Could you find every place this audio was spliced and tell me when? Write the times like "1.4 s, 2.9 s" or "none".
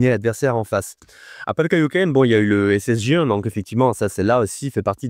none